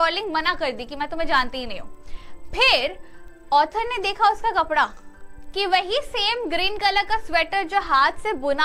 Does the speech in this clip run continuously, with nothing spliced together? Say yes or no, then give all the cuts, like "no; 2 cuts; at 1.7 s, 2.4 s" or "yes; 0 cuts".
yes; 0 cuts